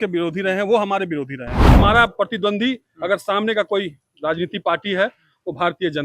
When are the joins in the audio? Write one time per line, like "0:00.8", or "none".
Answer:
0:01.8